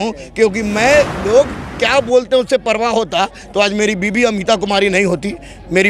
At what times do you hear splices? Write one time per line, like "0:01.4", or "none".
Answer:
0:01.2